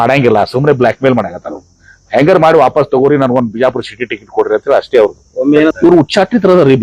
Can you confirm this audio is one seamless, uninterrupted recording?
no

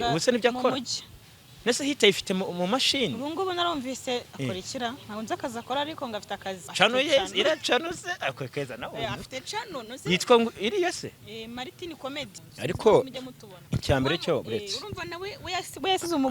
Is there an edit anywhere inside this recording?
yes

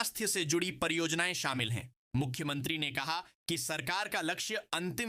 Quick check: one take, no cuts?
yes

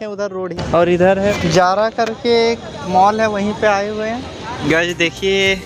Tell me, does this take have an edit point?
yes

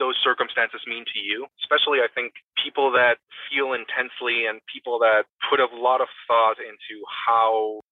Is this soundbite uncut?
no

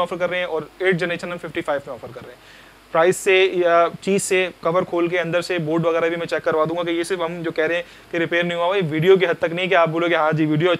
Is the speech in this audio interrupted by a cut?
no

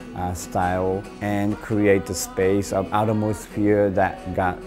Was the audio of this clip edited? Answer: yes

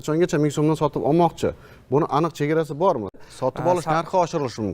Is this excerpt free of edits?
no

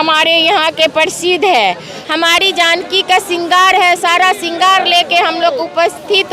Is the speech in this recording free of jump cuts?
no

